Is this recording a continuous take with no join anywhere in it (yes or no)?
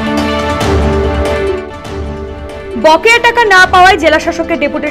yes